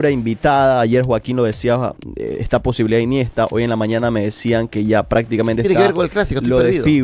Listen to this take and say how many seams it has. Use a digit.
0